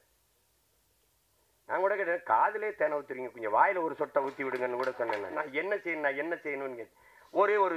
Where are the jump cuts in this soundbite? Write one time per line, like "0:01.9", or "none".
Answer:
0:05.3